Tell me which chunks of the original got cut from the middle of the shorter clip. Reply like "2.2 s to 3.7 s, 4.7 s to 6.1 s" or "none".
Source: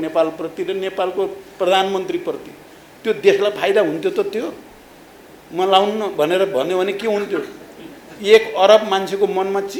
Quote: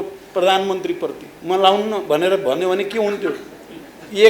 2.5 s to 5.4 s